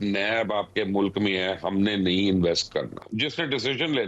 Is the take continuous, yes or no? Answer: no